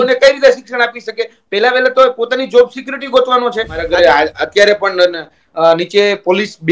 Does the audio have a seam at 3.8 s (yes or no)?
yes